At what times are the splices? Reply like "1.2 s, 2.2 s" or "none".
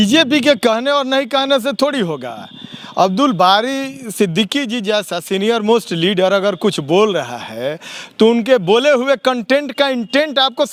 none

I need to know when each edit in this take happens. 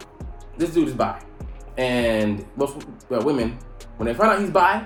none

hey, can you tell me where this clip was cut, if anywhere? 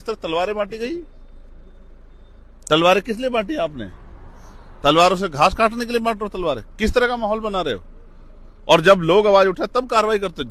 none

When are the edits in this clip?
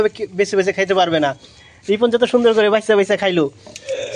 2.9 s

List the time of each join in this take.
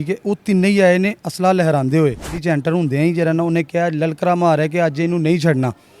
2.4 s

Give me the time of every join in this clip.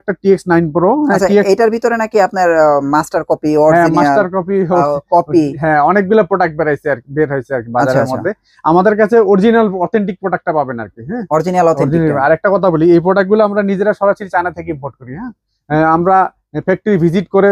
none

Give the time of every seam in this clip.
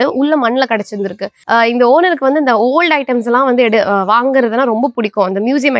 1.4 s

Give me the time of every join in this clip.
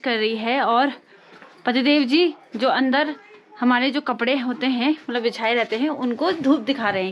none

